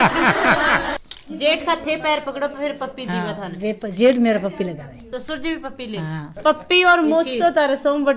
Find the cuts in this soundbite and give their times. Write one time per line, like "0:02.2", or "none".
0:00.9
0:05.0
0:06.3